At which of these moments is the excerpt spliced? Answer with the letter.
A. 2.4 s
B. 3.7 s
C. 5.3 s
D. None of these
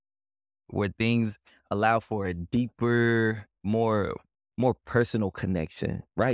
D